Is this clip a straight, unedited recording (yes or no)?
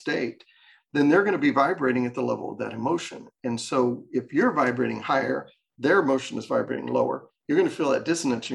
yes